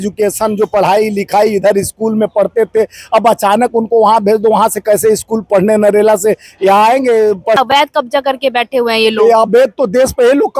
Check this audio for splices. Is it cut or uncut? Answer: cut